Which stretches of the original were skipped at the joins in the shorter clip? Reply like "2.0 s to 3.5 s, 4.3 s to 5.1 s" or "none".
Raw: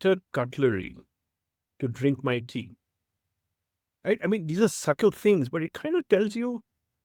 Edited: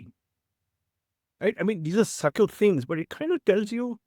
none